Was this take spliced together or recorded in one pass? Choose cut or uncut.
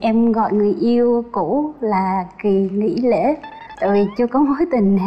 uncut